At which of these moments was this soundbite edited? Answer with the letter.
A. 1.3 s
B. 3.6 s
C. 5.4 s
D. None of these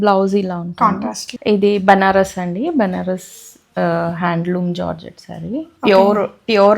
A